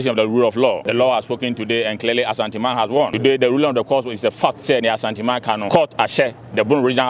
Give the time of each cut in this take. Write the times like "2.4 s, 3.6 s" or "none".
0.8 s, 3.1 s, 5.6 s